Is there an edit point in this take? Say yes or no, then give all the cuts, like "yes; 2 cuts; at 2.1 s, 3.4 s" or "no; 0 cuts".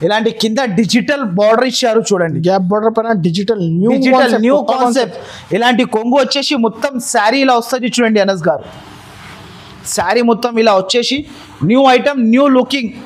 no; 0 cuts